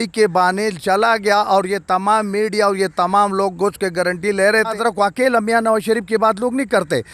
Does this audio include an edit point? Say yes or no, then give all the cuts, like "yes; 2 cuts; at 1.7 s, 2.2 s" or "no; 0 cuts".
yes; 1 cut; at 4.7 s